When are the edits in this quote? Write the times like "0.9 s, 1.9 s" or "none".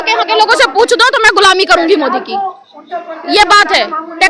none